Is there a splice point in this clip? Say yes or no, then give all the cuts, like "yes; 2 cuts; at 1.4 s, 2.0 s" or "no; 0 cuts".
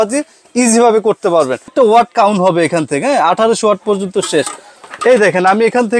yes; 1 cut; at 1.7 s